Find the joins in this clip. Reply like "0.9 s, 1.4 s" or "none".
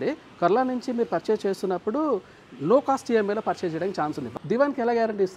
4.2 s

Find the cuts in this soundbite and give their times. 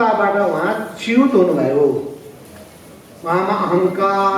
none

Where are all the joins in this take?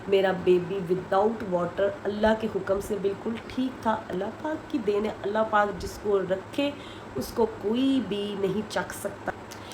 none

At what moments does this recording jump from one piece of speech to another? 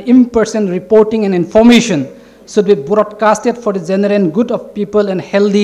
none

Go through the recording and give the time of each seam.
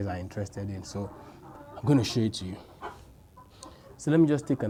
none

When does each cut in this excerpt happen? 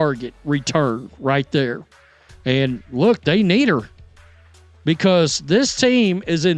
none

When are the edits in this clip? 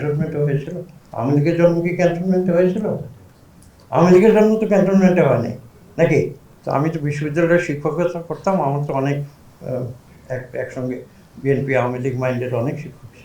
6.4 s

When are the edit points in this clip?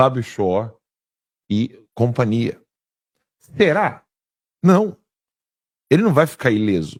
none

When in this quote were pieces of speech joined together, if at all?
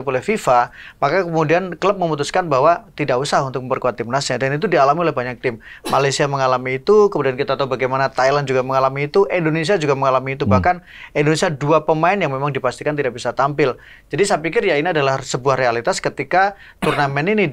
none

